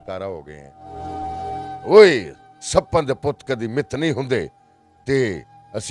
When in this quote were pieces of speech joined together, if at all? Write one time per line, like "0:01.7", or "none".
0:01.2

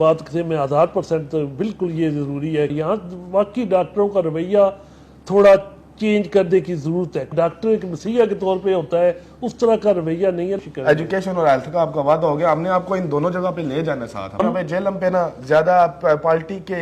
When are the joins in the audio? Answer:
0:02.7
0:07.3
0:10.6
0:14.4

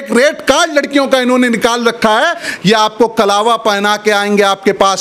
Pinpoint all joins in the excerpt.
0:02.5

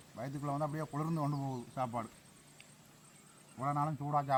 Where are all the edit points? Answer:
none

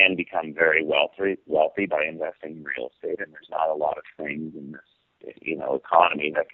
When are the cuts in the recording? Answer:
none

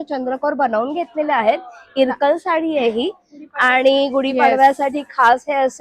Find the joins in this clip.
none

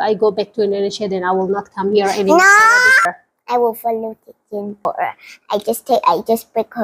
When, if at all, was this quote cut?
0:03.1
0:04.9

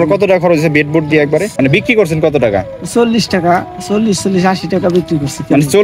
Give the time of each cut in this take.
0:01.5

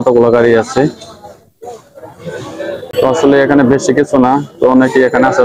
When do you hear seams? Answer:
0:02.9

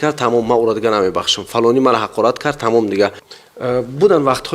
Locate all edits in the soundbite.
0:03.3

